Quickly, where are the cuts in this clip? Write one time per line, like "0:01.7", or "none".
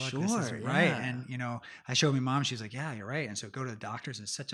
none